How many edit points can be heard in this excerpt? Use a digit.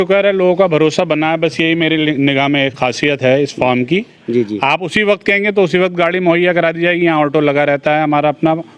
1